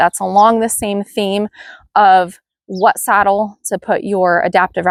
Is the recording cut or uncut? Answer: uncut